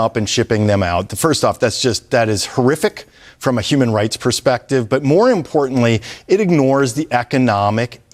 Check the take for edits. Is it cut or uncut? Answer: uncut